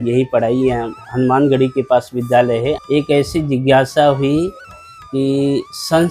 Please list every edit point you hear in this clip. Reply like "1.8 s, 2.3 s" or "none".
2.8 s